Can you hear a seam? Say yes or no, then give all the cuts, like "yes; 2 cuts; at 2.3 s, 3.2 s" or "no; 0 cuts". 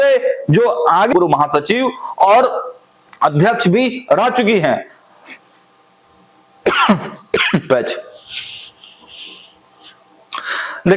yes; 1 cut; at 1.1 s